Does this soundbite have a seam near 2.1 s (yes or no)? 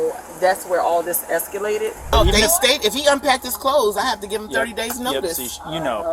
yes